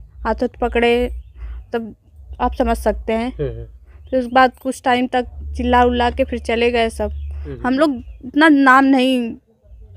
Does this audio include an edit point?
yes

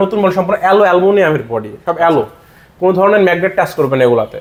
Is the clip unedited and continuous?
yes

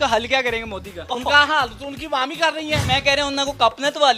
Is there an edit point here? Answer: yes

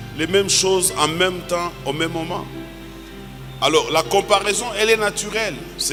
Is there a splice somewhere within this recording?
no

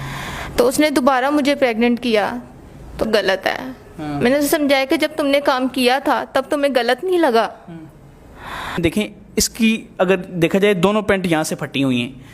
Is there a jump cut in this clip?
yes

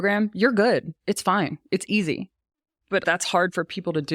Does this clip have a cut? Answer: yes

